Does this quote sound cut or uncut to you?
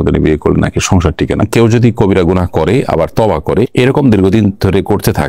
cut